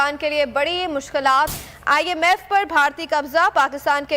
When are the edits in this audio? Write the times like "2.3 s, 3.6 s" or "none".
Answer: 1.6 s